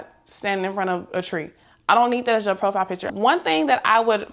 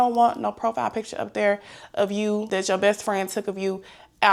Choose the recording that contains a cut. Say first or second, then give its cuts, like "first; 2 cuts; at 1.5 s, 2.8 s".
first; 1 cut; at 3.0 s